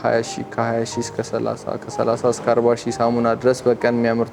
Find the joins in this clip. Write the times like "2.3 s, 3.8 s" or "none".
none